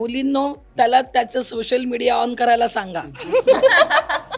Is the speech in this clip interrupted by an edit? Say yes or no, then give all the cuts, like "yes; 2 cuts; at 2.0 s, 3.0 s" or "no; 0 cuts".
no; 0 cuts